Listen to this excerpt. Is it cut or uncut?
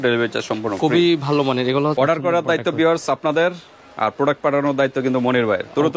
cut